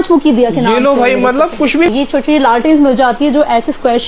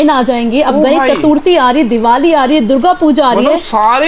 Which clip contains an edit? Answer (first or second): first